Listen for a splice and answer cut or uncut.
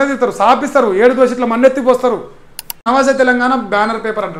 cut